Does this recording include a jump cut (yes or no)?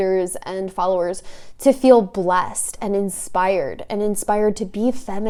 no